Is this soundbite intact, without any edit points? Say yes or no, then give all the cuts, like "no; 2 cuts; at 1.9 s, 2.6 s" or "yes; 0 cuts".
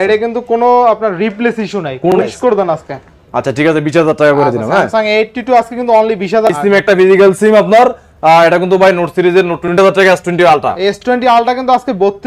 no; 3 cuts; at 2.1 s, 6.5 s, 9.8 s